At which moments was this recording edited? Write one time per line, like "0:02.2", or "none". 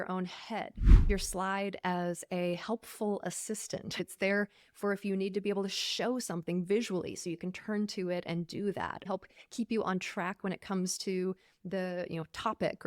0:01.1
0:04.0
0:09.1